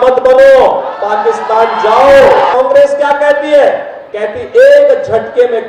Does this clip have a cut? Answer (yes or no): yes